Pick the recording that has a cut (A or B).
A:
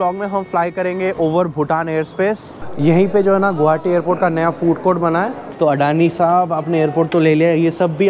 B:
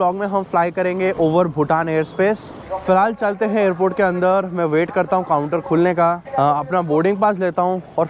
A